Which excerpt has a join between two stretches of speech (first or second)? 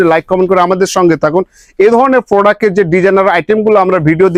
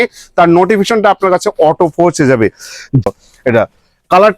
second